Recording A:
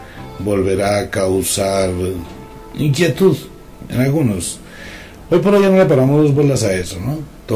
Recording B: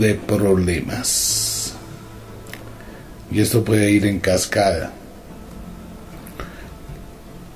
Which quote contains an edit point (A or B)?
A